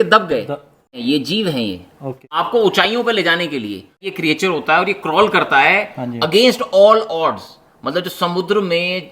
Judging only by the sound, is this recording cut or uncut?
cut